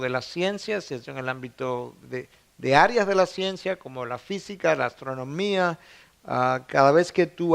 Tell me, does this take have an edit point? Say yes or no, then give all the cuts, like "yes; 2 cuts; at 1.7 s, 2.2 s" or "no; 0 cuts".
no; 0 cuts